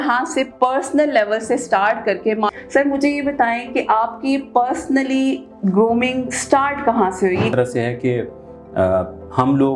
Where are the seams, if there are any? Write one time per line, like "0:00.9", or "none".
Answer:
0:02.6
0:07.5